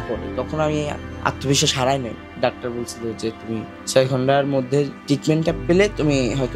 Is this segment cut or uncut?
cut